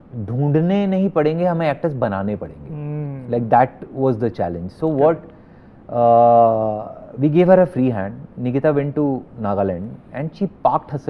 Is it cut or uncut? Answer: uncut